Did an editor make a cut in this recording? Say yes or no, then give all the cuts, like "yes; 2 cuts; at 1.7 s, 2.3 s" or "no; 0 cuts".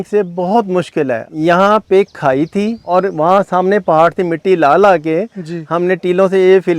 yes; 2 cuts; at 1.3 s, 2.8 s